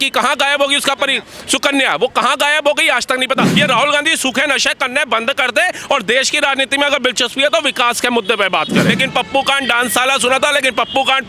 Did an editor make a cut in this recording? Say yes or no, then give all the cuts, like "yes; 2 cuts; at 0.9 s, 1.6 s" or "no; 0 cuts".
yes; 2 cuts; at 3.5 s, 8.9 s